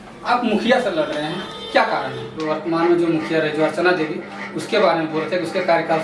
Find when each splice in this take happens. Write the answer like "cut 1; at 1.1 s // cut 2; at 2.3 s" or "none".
cut 1; at 2.5 s